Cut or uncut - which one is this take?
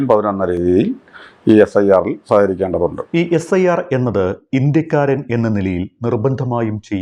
uncut